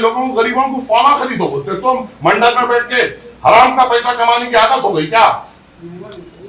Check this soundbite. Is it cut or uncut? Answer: uncut